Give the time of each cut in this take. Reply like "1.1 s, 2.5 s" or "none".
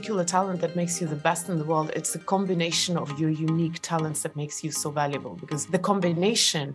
5.6 s